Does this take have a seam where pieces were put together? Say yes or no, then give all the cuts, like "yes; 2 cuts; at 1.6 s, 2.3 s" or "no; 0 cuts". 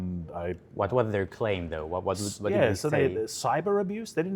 no; 0 cuts